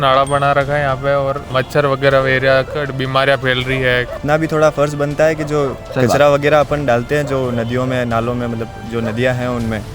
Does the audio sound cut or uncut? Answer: cut